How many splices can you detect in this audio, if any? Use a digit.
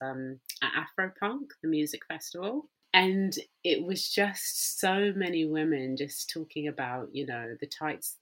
1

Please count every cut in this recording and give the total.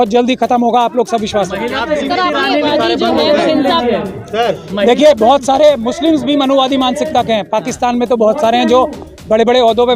1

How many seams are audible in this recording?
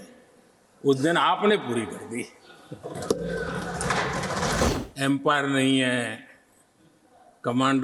1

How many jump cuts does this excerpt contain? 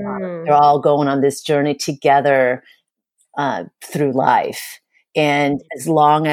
1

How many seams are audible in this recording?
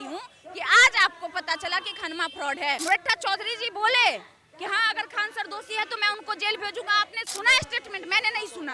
1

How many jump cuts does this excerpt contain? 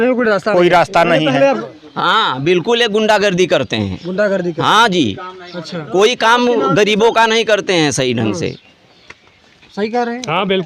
1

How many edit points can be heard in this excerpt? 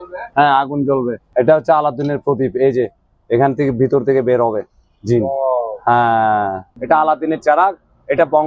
2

